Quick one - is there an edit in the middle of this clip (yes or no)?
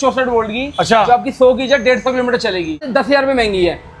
yes